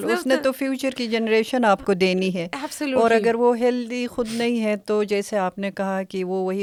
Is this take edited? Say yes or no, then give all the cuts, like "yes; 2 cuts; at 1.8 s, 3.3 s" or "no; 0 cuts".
no; 0 cuts